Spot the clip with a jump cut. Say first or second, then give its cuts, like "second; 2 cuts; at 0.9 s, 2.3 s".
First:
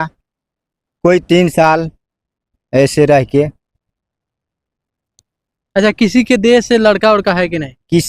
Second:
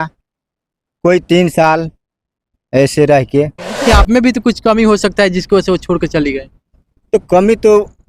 second; 1 cut; at 3.9 s